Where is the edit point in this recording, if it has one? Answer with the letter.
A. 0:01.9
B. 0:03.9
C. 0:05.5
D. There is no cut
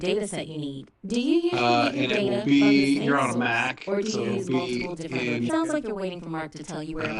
C